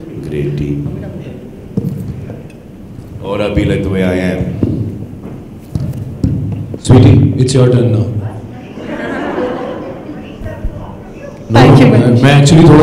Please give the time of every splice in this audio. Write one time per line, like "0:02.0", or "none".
0:06.8